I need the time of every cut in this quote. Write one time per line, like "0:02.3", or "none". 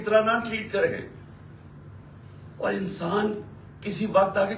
none